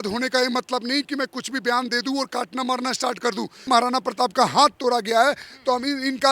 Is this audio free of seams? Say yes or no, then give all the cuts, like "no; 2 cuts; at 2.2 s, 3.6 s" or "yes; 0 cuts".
no; 1 cut; at 3.7 s